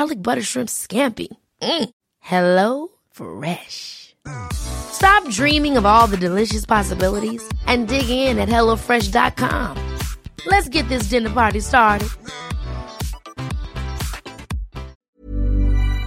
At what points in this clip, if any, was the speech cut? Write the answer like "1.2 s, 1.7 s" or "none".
15.0 s